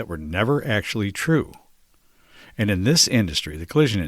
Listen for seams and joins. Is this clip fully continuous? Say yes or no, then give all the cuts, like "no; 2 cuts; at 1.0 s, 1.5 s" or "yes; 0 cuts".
yes; 0 cuts